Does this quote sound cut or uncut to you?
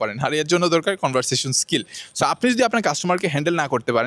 cut